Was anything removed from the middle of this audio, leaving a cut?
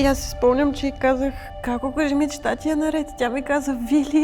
yes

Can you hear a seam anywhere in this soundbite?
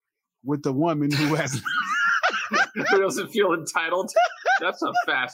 yes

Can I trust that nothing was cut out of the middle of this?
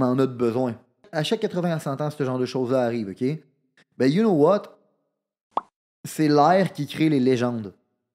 no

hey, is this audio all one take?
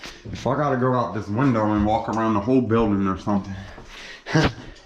yes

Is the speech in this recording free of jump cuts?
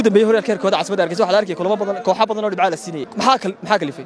no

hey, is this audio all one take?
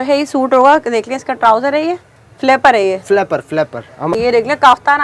no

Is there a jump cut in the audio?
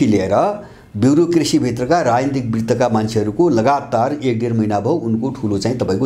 no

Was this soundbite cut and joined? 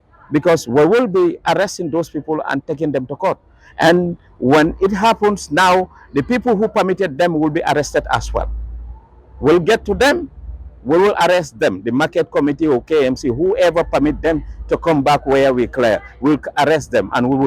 no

